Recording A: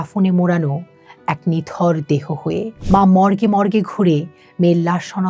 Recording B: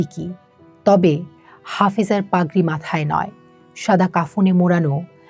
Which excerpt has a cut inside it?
A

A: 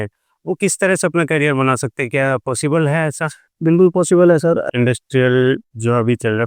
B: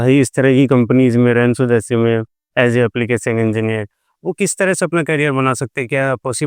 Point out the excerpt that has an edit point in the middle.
A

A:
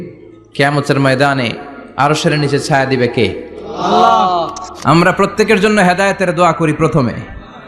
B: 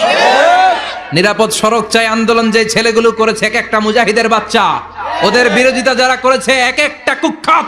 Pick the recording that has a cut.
A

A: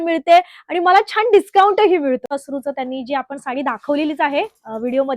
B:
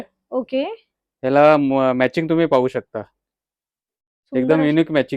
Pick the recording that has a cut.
A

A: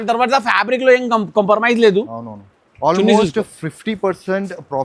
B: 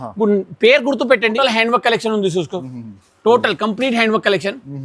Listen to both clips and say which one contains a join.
B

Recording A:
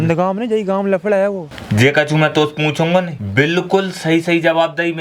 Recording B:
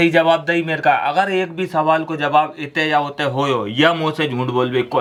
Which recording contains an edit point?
A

